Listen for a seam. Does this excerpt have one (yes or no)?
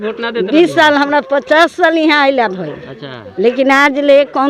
no